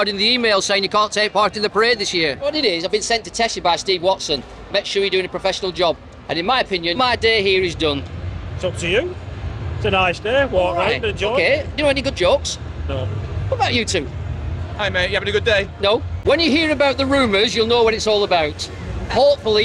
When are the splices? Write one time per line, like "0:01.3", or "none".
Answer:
0:02.5
0:07.0
0:16.1